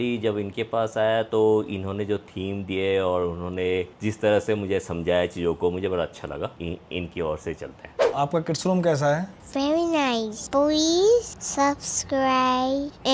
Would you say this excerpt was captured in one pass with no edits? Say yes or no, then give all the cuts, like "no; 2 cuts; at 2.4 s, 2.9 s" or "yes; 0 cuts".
no; 4 cuts; at 6.6 s, 8.0 s, 10.4 s, 11.4 s